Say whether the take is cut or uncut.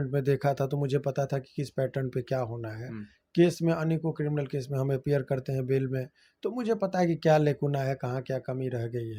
uncut